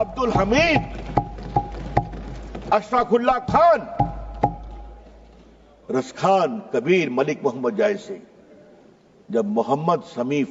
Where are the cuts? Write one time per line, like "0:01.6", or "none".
none